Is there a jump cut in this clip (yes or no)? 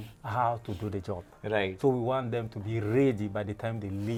no